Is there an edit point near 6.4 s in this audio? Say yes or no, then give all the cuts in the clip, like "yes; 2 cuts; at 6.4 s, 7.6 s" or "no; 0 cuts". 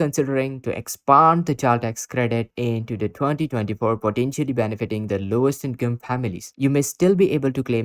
yes; 1 cut; at 6.4 s